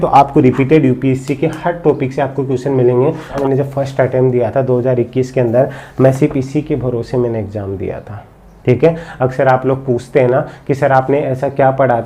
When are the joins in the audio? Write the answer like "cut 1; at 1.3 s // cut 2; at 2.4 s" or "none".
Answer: cut 1; at 3.4 s